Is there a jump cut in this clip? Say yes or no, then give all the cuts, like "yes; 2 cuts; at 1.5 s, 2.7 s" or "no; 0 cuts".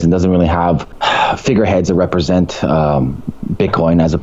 yes; 1 cut; at 0.9 s